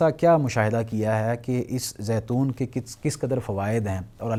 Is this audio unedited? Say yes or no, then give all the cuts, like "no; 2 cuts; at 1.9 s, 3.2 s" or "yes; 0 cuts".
yes; 0 cuts